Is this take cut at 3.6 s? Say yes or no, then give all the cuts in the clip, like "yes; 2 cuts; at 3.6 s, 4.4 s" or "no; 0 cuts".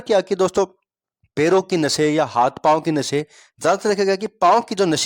no; 0 cuts